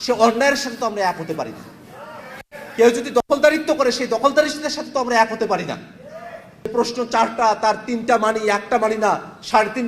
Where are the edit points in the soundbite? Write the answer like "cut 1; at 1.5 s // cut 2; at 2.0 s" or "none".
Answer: cut 1; at 6.7 s